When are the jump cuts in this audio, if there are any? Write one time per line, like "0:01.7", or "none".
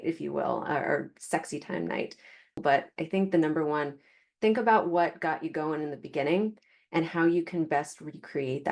0:02.6

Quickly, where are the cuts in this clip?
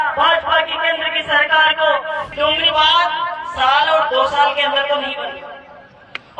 0:02.2

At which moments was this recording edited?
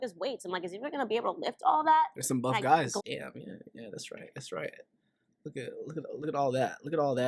0:03.0

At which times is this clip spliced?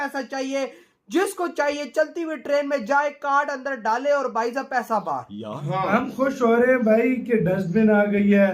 0:05.6

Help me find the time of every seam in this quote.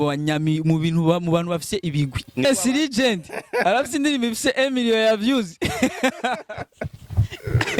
0:02.4

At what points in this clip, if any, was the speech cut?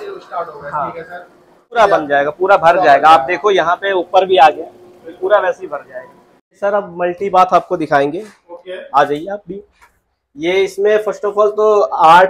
0:01.8
0:06.6

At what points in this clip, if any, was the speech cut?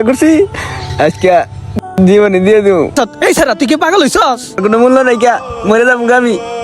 0:02.9
0:04.6

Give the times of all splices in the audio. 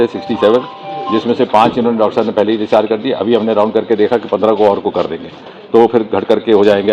none

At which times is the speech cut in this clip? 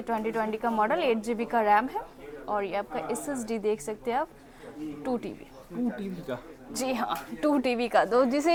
none

